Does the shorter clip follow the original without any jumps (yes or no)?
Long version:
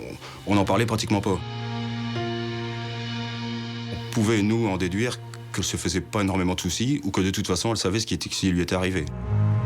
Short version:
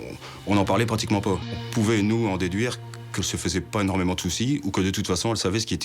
no